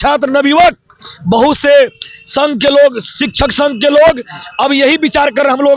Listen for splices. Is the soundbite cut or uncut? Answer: uncut